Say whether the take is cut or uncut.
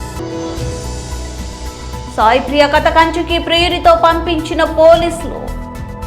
uncut